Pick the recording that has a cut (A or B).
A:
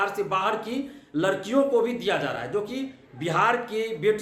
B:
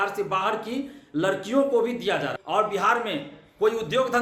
B